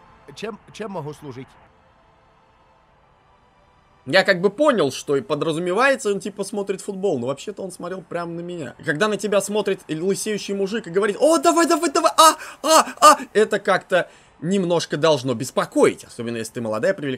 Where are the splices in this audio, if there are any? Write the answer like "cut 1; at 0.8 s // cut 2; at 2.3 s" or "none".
cut 1; at 1.7 s // cut 2; at 8.8 s